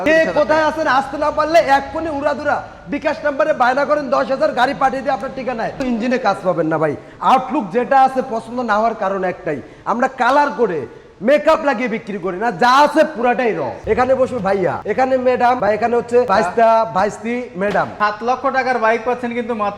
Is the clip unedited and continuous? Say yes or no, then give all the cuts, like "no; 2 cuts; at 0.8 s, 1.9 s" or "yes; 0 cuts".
no; 3 cuts; at 5.8 s, 13.7 s, 17.9 s